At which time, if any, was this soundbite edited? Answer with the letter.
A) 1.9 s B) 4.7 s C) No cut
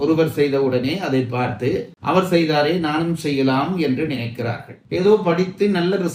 B